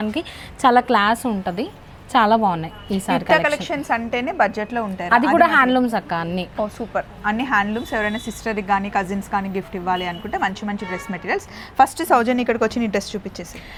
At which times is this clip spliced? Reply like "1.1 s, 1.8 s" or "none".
none